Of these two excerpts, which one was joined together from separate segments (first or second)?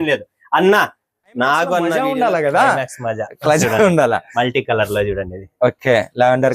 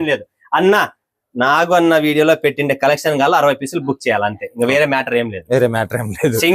first